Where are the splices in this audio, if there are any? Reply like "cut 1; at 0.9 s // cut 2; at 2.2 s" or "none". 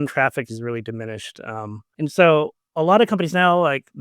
cut 1; at 1.8 s // cut 2; at 2.6 s